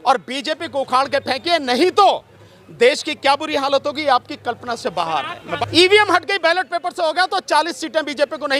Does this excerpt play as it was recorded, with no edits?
no; 1 cut; at 5.5 s

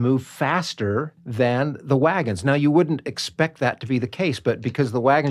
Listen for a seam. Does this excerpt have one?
yes; 1 cut; at 1.2 s

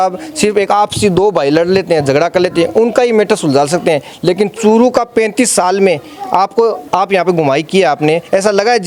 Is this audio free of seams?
yes; 0 cuts

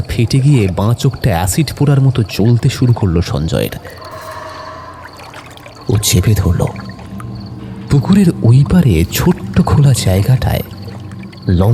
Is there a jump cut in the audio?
no; 0 cuts

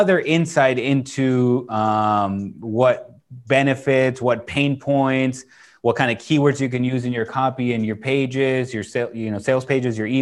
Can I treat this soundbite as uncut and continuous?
yes; 0 cuts

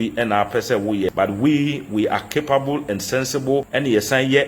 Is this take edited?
yes; 2 cuts; at 1.1 s, 3.7 s

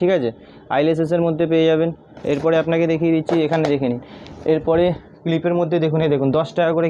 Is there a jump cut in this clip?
no; 0 cuts

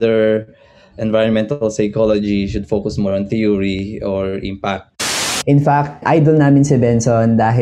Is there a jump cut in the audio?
yes; 1 cut; at 5.0 s

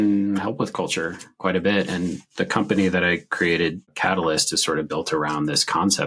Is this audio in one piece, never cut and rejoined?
yes; 0 cuts

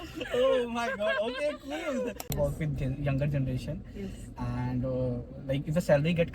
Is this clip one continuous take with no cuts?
no; 1 cut; at 2.3 s

